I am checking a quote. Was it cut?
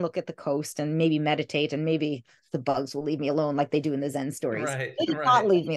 yes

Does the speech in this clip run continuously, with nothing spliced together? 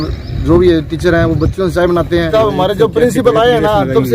no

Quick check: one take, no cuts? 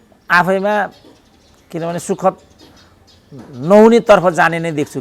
yes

